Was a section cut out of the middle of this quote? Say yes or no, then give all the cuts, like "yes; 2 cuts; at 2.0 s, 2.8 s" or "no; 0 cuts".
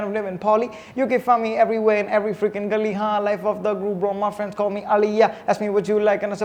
no; 0 cuts